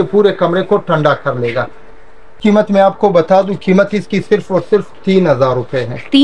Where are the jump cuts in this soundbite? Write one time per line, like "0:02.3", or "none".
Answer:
0:02.2